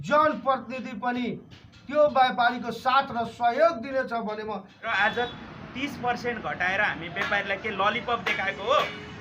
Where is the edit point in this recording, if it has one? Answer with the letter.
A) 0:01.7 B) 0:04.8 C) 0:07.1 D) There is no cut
B